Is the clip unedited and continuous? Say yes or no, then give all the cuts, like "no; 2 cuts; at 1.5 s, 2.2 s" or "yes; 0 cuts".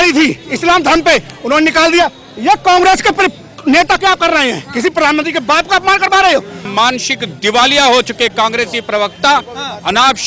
no; 1 cut; at 6.6 s